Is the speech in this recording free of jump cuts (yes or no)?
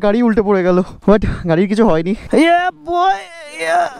yes